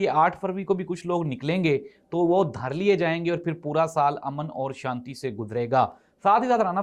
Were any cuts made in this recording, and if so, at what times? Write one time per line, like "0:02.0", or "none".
none

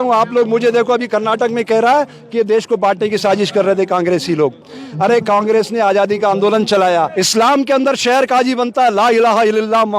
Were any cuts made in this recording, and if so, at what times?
0:07.1

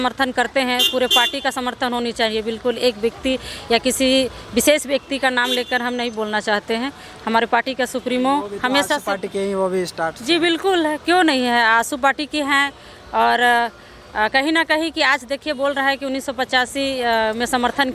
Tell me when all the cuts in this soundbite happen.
none

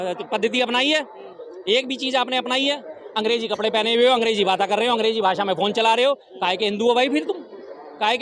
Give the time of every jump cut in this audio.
none

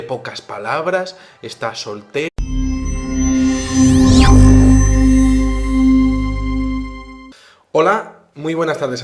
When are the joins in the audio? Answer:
none

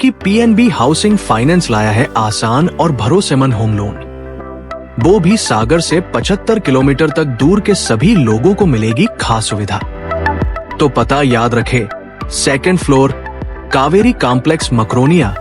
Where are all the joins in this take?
0:10.6

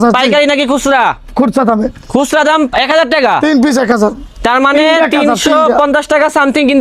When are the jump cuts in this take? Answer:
none

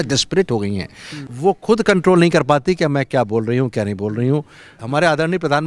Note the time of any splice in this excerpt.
0:01.2
0:04.8

